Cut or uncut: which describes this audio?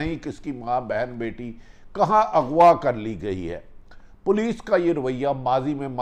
uncut